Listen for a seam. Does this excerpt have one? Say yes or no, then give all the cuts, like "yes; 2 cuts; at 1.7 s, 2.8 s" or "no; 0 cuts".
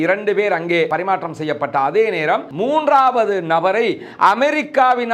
no; 0 cuts